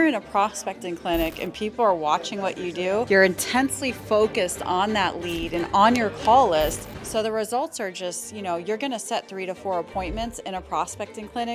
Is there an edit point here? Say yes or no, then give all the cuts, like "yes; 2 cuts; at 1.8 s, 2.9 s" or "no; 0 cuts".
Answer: no; 0 cuts